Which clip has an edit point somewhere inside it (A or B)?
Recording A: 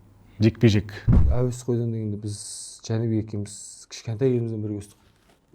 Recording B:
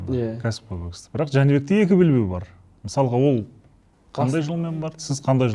A